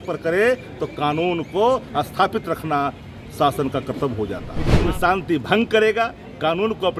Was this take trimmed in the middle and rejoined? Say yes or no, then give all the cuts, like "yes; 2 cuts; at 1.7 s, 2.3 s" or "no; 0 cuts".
yes; 1 cut; at 4.8 s